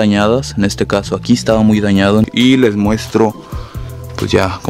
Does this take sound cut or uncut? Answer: cut